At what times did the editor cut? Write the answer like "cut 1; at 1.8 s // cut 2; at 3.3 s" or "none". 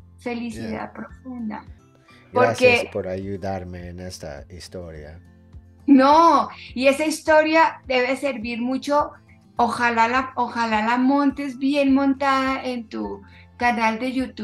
cut 1; at 1.8 s